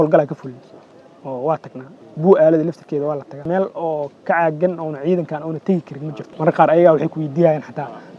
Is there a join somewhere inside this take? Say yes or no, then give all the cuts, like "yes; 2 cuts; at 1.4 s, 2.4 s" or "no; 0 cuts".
yes; 2 cuts; at 3.5 s, 6.3 s